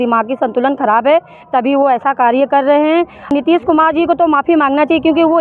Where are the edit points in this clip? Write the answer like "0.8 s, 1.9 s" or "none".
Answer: 3.3 s